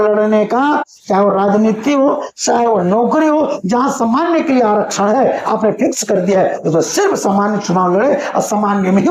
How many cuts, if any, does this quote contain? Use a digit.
0